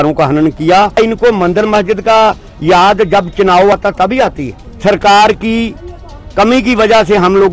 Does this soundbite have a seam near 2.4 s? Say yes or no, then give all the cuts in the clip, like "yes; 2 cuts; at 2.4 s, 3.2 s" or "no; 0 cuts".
no; 2 cuts; at 1.0 s, 4.1 s